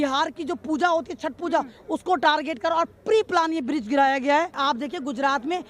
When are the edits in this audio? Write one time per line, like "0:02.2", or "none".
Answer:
0:04.5